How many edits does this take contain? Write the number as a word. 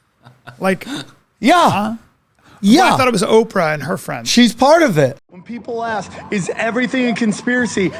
one